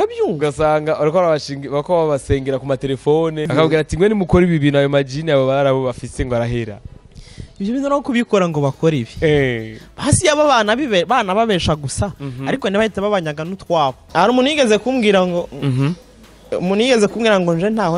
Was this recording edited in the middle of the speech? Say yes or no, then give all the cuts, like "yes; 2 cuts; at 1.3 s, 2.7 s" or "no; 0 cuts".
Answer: yes; 2 cuts; at 3.5 s, 14.0 s